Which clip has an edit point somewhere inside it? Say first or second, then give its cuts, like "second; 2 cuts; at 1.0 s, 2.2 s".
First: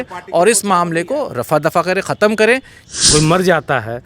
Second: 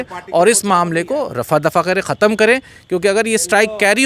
first; 1 cut; at 2.7 s